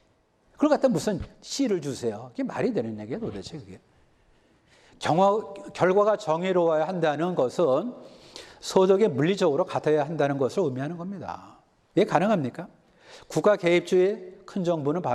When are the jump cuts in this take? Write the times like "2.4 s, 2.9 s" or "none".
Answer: none

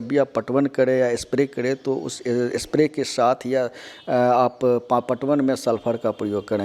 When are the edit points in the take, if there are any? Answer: none

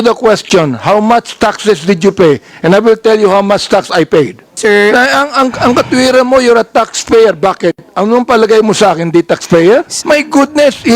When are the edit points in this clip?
4.4 s, 9.9 s

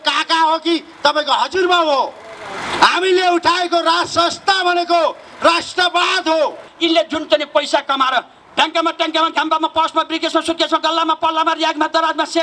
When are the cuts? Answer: 6.7 s

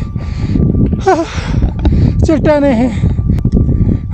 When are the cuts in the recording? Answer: none

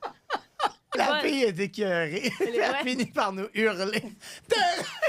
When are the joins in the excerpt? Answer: 0.9 s

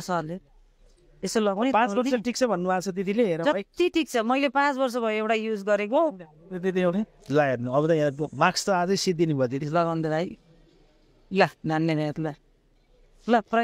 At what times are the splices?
9.6 s

